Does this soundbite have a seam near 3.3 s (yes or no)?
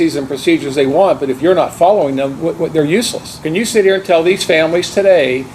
yes